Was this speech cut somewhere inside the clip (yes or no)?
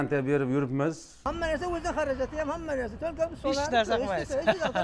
yes